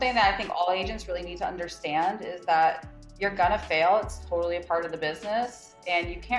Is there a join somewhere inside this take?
no; 0 cuts

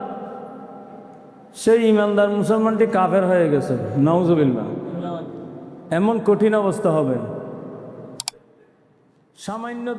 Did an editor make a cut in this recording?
yes; 1 cut; at 8.4 s

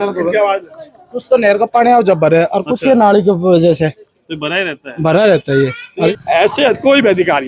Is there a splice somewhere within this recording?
yes; 1 cut; at 6.1 s

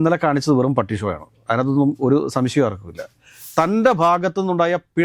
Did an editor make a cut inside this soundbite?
yes; 1 cut; at 3.3 s

